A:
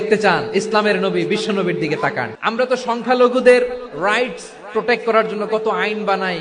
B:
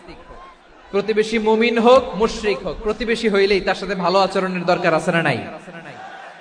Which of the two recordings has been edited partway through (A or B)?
A